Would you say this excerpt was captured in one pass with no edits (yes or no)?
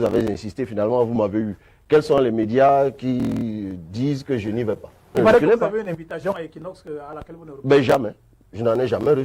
no